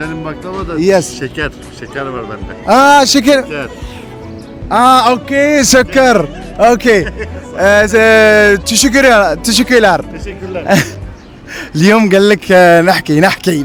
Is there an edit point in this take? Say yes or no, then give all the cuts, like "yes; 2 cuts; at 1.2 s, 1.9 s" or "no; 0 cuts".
no; 0 cuts